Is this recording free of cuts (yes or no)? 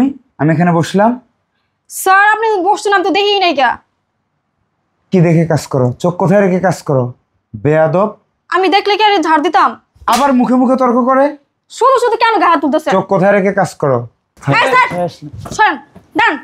no